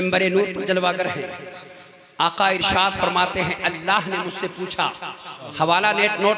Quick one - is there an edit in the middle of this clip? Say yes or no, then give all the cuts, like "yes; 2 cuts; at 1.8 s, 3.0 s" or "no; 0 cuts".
yes; 1 cut; at 5.4 s